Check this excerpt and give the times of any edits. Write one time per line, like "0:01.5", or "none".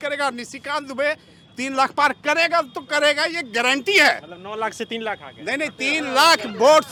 none